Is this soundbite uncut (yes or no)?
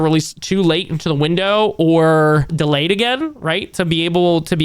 no